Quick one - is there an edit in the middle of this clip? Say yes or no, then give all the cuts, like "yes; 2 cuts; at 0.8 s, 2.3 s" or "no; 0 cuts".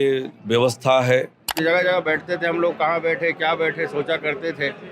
yes; 1 cut; at 1.6 s